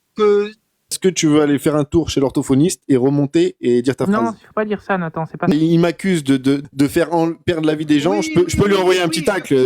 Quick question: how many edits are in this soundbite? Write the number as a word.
three